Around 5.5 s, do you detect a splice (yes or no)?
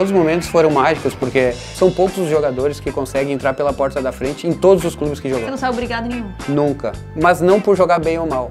no